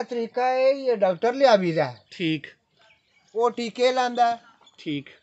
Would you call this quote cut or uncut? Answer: uncut